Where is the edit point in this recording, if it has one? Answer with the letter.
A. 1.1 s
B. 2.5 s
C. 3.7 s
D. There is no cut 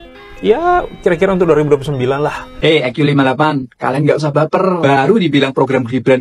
B